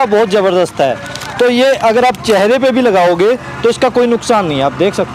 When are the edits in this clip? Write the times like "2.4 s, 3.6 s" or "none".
none

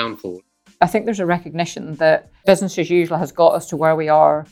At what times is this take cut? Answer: 0.8 s, 2.3 s

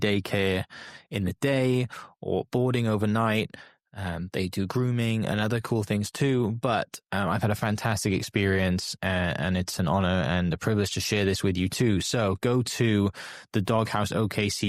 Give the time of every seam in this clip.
none

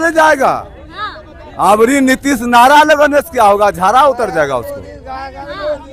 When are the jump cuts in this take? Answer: none

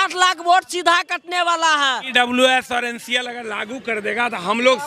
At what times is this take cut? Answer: 2.0 s

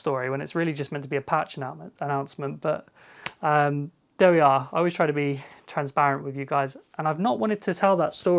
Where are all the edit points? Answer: none

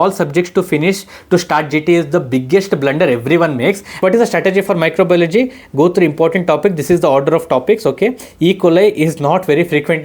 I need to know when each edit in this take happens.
4.0 s

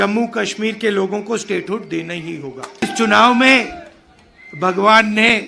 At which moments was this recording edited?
2.8 s

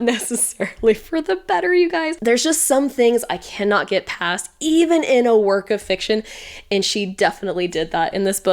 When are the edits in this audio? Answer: 2.2 s

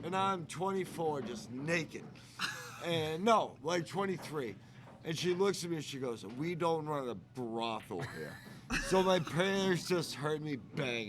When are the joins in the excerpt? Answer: none

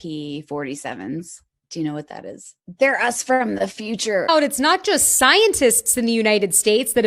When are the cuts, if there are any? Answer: 4.3 s

